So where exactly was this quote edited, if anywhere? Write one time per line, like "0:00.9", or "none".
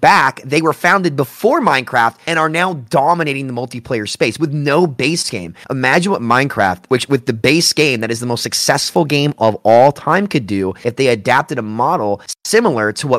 none